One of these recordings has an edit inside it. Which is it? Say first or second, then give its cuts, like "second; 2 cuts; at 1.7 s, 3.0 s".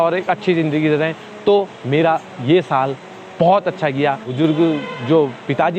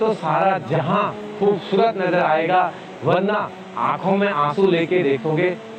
first; 1 cut; at 4.3 s